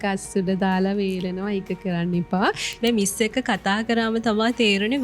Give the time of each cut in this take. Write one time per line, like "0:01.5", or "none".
0:02.8